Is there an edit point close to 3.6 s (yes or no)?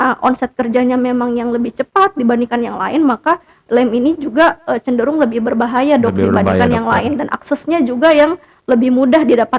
no